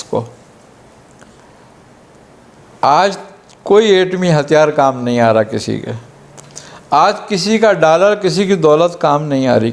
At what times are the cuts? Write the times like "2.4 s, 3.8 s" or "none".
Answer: 2.6 s

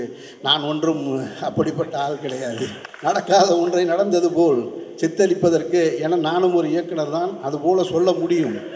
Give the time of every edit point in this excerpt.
2.8 s

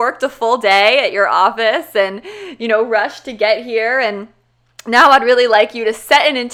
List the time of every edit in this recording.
none

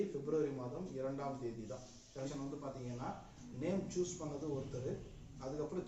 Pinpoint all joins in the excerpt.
2.3 s

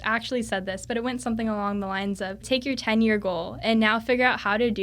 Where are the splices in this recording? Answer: 2.4 s

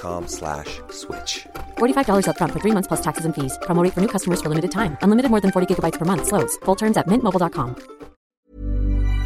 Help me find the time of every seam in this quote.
8.4 s

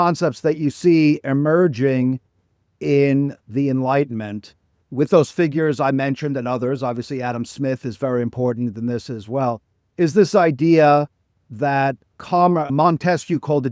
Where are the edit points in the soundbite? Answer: none

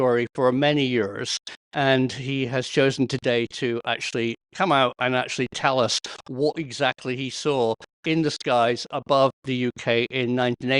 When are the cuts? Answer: none

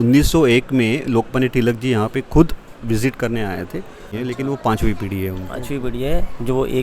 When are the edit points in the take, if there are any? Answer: 4.1 s

